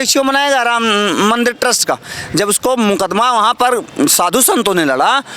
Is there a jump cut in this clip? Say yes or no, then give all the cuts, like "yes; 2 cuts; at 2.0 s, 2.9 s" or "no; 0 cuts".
no; 0 cuts